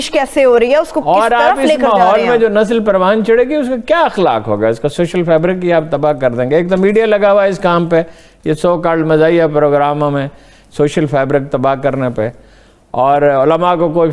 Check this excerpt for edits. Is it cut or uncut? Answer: uncut